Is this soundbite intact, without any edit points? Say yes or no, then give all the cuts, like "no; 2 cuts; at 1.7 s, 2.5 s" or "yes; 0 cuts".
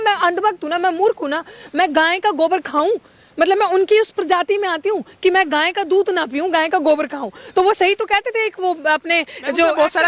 yes; 0 cuts